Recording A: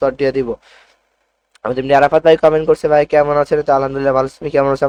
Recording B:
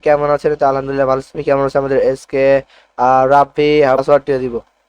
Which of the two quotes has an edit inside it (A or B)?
B